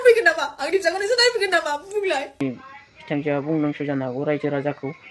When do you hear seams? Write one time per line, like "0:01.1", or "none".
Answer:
0:02.4